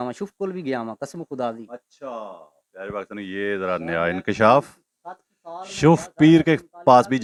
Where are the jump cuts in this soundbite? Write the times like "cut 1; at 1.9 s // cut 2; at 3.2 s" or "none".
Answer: none

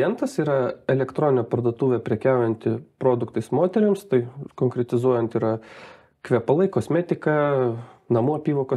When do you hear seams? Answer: none

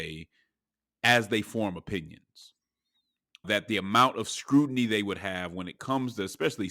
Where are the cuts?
cut 1; at 3.5 s

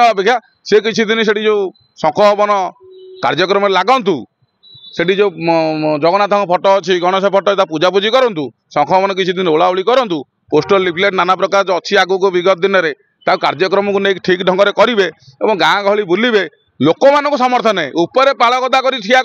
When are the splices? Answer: none

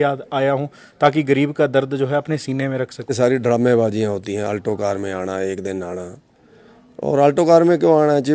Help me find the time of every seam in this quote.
cut 1; at 3.1 s

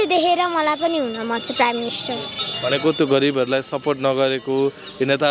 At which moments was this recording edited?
none

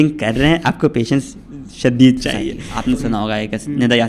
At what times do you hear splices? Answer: cut 1; at 2.7 s

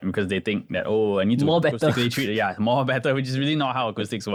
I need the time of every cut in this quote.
none

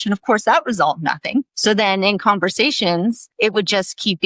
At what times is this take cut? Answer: cut 1; at 1.5 s // cut 2; at 3.3 s

